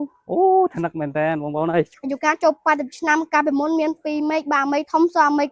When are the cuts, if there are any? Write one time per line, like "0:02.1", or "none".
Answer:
0:01.9